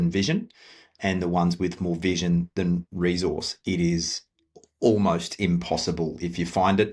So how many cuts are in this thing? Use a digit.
0